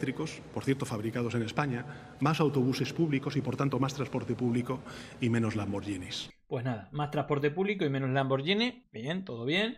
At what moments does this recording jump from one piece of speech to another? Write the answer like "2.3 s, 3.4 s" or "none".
6.2 s

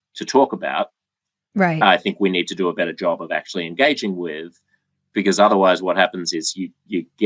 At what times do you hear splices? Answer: none

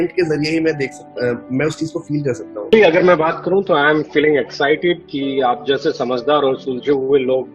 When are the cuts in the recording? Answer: 2.7 s

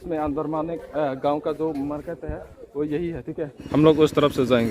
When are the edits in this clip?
3.6 s

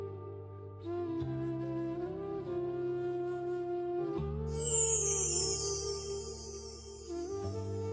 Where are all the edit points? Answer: 1.5 s

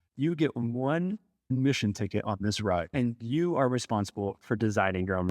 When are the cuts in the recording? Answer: 1.5 s, 2.9 s

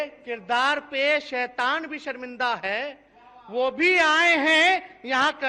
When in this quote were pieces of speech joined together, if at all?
none

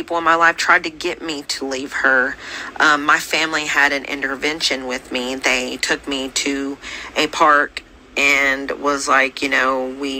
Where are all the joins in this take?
none

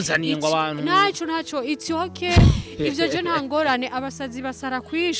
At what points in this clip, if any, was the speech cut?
none

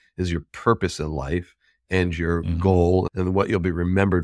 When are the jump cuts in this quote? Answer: 3.1 s

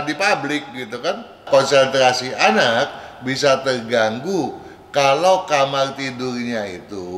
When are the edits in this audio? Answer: 1.4 s

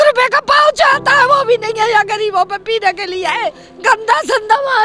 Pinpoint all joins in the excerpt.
3.7 s

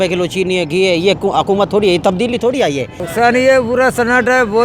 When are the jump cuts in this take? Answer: 3.0 s

